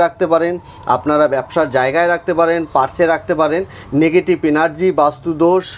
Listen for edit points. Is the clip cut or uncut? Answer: uncut